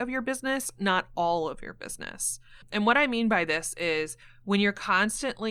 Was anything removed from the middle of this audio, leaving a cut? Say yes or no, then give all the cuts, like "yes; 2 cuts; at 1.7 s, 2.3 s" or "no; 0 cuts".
yes; 1 cut; at 2.6 s